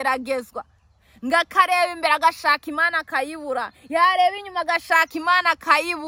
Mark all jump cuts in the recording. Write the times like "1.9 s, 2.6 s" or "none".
none